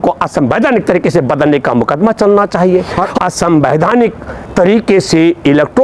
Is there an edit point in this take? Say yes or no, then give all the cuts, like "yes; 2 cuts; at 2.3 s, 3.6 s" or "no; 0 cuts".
yes; 1 cut; at 3.0 s